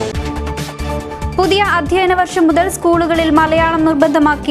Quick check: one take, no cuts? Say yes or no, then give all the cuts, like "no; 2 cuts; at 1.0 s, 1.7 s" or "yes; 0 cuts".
no; 1 cut; at 1.0 s